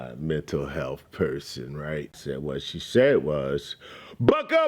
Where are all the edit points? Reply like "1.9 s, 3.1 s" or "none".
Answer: 2.2 s

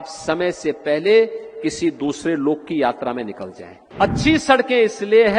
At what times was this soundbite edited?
3.9 s

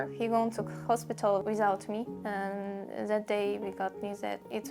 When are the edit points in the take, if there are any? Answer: 1.4 s

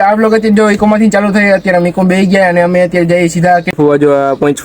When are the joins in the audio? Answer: 3.7 s

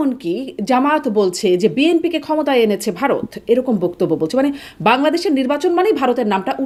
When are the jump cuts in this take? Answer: none

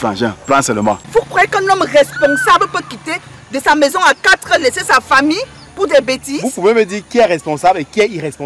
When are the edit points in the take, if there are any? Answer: 1.0 s

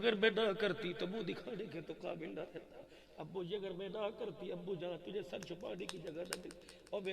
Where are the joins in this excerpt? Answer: none

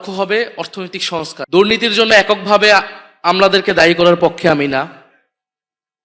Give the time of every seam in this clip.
1.4 s

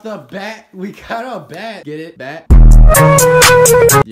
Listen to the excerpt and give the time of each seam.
none

